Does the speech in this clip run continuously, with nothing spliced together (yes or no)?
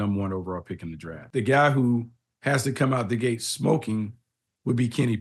no